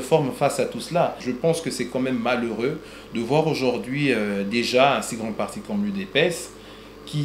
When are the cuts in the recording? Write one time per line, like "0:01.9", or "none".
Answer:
0:01.2